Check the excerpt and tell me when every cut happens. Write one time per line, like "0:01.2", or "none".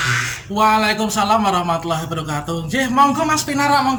none